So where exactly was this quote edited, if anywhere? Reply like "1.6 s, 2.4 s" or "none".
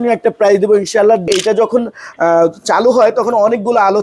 1.3 s